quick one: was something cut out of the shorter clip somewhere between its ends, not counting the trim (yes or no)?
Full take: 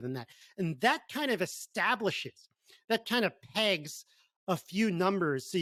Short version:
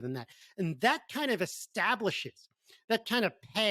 no